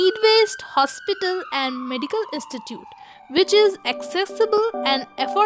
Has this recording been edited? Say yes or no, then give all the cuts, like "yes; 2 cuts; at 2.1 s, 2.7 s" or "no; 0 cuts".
no; 0 cuts